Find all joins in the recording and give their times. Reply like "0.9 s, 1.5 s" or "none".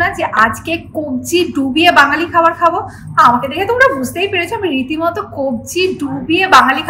none